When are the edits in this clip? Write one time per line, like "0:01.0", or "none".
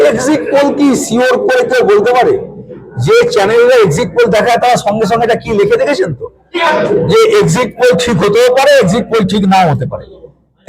none